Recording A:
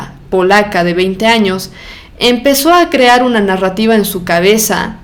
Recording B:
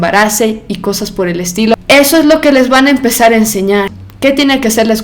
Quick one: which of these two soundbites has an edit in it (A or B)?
B